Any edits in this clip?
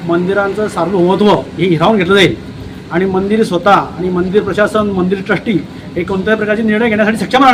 no; 0 cuts

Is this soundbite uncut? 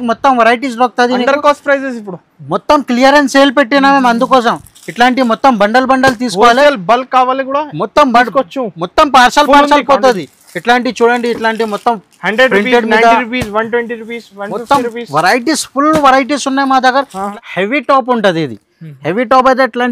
no; 1 cut; at 17.3 s

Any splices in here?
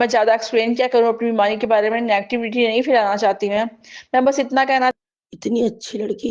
yes; 1 cut; at 4.9 s

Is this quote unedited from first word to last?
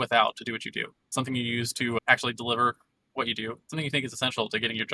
no; 1 cut; at 1.1 s

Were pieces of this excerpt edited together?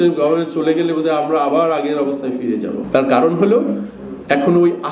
yes; 1 cut; at 2.8 s

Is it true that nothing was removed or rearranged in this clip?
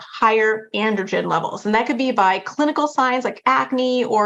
yes; 0 cuts

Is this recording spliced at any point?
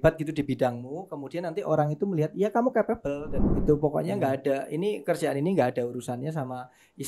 yes; 1 cut; at 3.6 s

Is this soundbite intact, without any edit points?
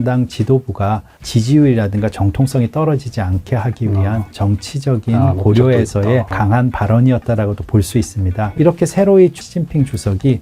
no; 4 cuts; at 1.2 s, 4.3 s, 6.3 s, 8.5 s

